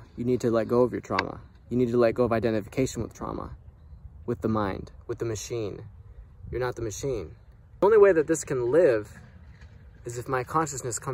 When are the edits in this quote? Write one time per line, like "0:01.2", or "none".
0:07.8